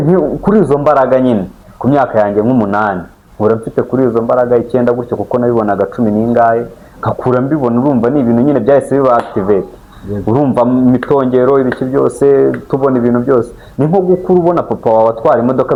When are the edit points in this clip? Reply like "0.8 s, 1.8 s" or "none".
none